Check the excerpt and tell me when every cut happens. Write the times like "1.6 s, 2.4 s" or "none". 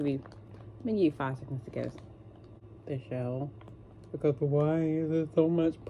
2.7 s